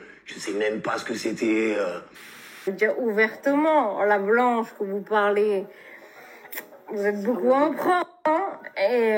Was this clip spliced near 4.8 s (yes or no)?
no